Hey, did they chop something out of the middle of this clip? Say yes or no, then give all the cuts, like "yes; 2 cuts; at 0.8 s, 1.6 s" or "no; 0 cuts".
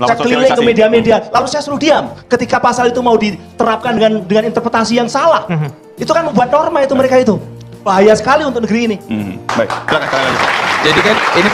no; 0 cuts